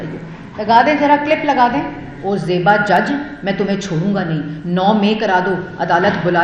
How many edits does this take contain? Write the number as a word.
one